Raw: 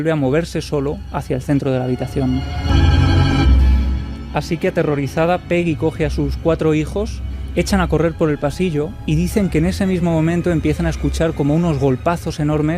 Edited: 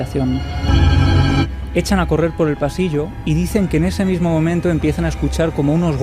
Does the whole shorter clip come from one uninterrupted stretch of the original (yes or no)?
no